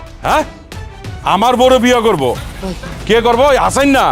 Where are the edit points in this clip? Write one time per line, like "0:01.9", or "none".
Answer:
0:02.7